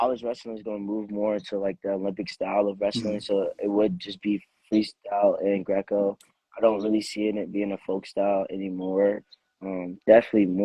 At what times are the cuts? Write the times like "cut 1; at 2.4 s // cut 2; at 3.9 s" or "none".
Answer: none